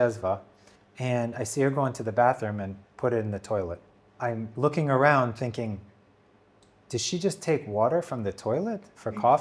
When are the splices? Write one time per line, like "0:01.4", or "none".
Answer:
none